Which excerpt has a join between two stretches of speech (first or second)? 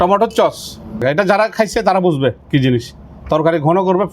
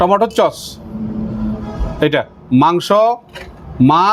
first